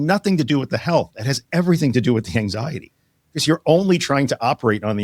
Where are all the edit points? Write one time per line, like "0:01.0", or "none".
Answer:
none